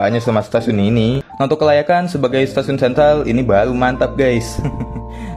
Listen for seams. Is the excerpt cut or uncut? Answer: cut